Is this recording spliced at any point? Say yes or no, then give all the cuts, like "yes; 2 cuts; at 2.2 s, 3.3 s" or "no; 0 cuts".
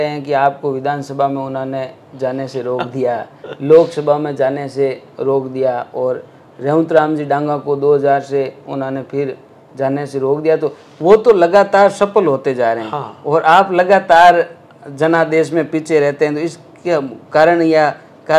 no; 0 cuts